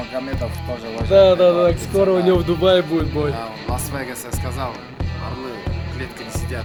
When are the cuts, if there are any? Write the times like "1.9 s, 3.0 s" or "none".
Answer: none